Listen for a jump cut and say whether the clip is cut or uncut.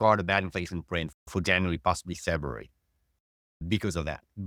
uncut